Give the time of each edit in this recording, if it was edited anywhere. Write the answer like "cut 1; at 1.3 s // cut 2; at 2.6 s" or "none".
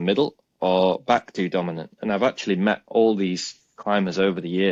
none